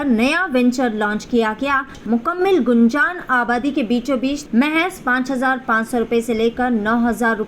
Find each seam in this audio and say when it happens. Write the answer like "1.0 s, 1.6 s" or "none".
2.0 s, 4.4 s